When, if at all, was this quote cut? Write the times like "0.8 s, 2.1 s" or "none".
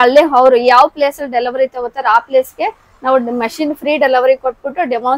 none